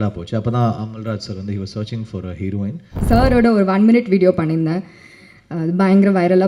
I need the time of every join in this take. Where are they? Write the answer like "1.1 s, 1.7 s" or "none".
3.0 s